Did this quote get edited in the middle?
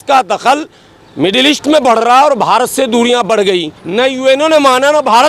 yes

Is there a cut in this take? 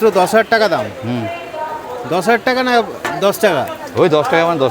yes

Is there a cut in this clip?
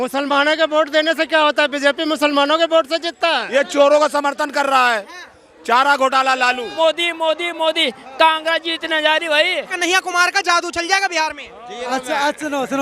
yes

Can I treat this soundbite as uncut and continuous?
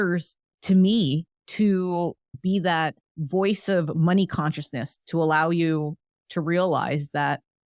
no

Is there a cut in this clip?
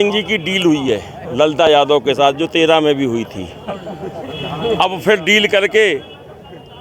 no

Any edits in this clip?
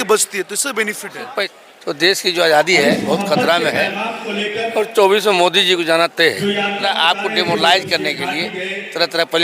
yes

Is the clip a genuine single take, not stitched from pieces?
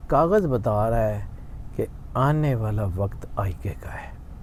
yes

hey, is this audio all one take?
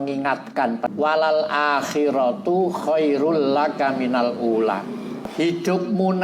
no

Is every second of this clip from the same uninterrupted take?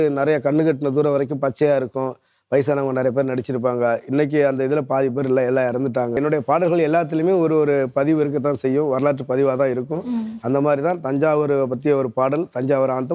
no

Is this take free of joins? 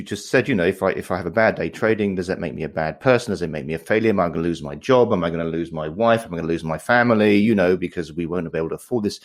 yes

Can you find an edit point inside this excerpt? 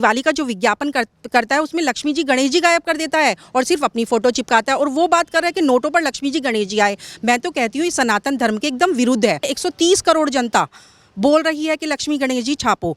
yes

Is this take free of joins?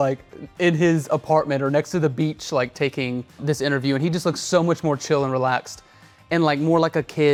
yes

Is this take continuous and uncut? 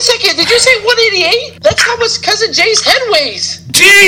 no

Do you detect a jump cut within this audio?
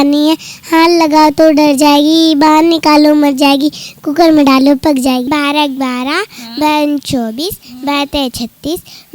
yes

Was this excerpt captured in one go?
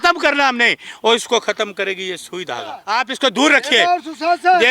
no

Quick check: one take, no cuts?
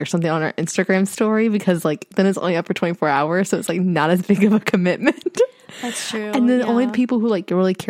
yes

